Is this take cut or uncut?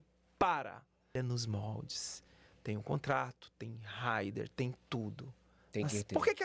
cut